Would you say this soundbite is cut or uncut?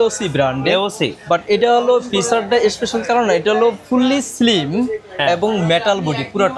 uncut